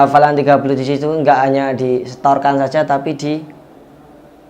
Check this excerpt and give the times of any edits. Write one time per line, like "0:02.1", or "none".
none